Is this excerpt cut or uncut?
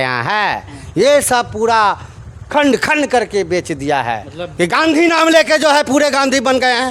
cut